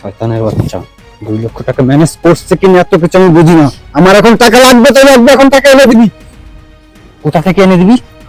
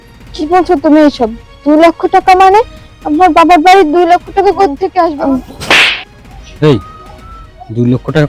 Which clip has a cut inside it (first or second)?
second